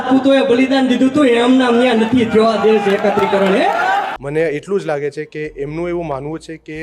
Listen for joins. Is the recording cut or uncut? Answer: cut